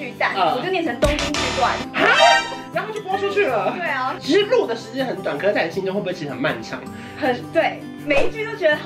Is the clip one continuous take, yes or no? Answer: yes